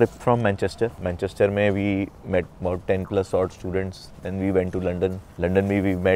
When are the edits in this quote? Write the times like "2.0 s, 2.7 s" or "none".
1.0 s